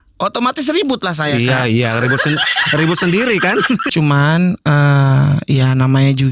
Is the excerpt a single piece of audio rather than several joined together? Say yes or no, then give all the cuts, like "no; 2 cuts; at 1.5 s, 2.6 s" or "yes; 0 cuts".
no; 1 cut; at 3.9 s